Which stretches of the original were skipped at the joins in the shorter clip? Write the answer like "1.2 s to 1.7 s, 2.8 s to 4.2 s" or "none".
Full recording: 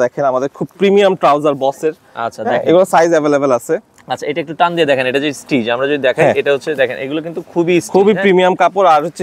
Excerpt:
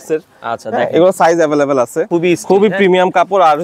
3.8 s to 7.5 s